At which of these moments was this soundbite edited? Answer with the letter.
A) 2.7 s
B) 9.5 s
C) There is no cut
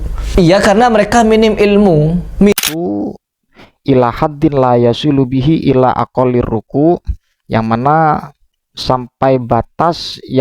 A